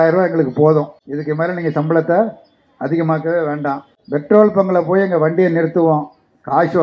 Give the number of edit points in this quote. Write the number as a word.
two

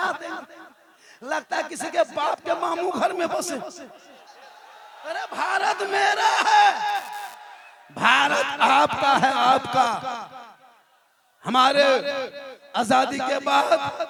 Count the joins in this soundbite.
zero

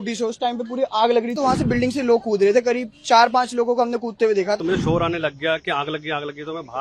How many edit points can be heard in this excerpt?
two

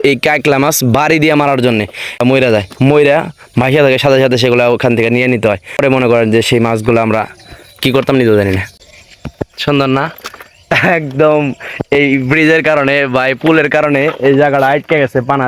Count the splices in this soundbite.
three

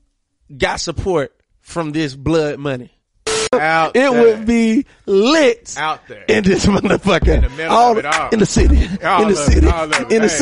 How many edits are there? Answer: one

